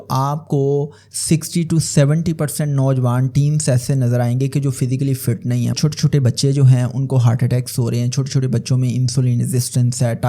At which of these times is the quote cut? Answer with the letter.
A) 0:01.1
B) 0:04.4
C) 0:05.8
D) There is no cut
C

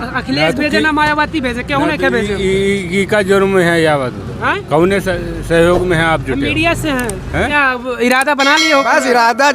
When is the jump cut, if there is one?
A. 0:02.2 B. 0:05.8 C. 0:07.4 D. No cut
C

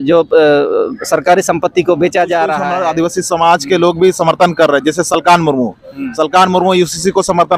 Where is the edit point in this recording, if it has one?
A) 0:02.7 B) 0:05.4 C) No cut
A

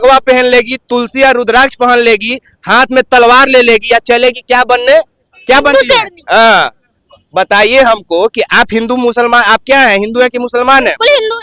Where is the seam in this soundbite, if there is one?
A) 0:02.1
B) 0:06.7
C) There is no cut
C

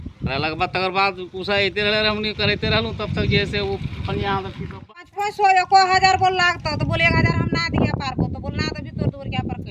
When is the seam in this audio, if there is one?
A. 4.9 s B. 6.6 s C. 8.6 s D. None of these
A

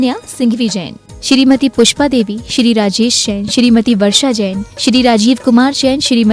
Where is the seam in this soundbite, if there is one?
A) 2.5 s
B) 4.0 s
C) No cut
B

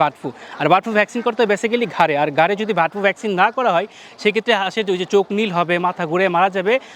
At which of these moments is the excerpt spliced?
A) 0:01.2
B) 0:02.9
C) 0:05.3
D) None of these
D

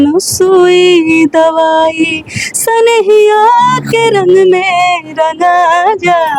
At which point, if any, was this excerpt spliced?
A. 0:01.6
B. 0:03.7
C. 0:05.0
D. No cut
D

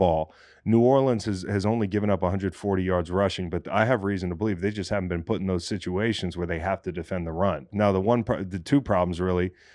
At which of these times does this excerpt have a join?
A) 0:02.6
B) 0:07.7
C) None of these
B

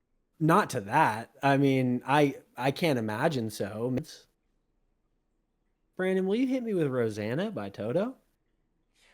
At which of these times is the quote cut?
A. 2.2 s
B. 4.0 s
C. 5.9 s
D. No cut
B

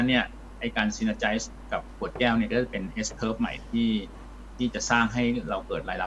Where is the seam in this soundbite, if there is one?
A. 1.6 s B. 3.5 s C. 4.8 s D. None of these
A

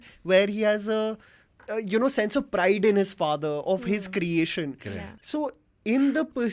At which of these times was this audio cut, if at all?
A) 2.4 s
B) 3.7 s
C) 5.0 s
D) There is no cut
C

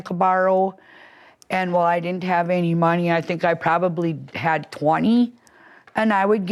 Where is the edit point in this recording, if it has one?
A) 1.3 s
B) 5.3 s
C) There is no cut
C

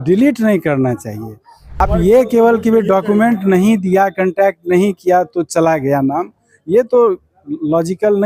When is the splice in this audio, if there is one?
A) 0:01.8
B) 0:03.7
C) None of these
A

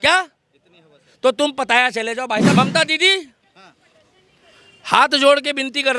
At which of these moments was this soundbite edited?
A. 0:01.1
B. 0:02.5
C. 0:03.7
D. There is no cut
B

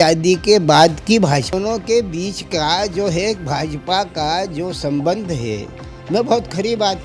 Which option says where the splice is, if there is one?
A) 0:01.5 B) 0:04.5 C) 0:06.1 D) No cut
A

